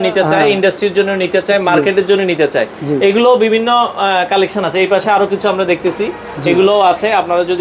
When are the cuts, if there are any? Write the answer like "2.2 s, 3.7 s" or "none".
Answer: none

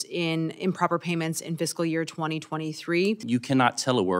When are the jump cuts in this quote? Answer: 3.2 s

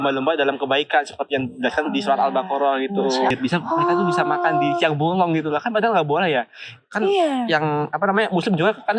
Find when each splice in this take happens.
3.3 s

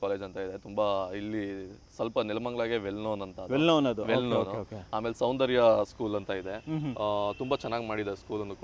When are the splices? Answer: none

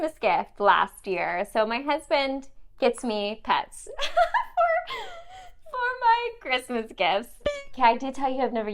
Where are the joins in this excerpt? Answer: 7.4 s

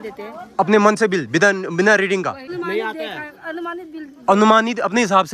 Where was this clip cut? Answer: 2.5 s

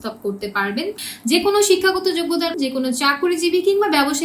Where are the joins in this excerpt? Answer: 0.9 s, 2.5 s

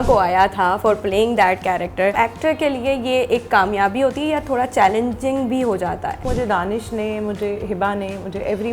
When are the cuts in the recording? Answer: 2.1 s, 6.2 s

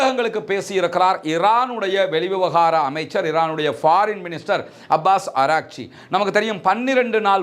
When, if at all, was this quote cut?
none

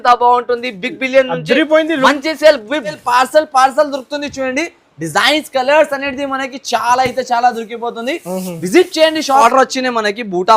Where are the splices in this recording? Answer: 3.0 s, 9.4 s

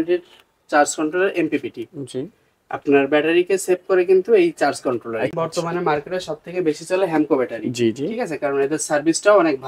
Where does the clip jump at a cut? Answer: 5.3 s

